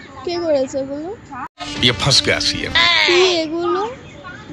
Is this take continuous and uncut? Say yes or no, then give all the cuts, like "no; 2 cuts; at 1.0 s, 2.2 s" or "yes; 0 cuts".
no; 1 cut; at 2.7 s